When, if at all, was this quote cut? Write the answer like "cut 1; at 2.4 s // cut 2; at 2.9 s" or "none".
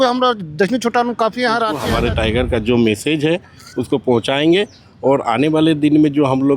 cut 1; at 1.8 s